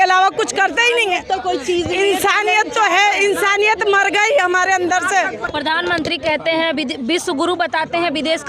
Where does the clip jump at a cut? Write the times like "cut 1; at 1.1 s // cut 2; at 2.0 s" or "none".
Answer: cut 1; at 5.4 s